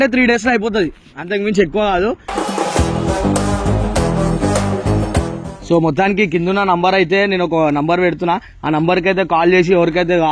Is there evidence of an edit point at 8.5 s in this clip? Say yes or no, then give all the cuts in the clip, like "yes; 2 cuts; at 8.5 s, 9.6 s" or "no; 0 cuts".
no; 1 cut; at 5.5 s